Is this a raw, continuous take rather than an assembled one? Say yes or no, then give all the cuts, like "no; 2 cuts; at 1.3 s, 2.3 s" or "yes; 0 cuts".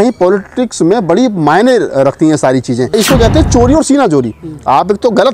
no; 1 cut; at 2.9 s